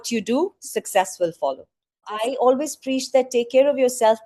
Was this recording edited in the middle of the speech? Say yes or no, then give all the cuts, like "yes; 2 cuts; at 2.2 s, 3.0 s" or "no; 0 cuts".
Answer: yes; 1 cut; at 2.2 s